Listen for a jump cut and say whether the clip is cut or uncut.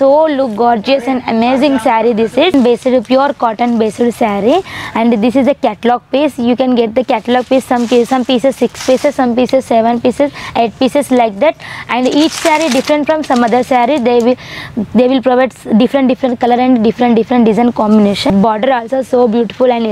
cut